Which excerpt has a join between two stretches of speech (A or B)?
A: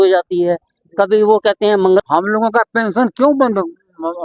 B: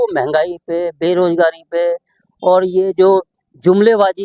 A